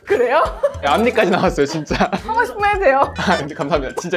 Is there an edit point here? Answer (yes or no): no